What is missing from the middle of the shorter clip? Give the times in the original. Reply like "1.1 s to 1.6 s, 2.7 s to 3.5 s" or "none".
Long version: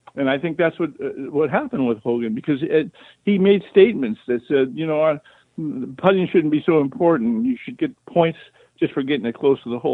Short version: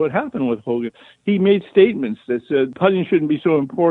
2.3 s to 3.0 s, 4.7 s to 6.0 s